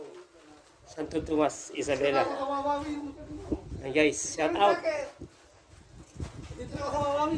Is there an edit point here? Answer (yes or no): no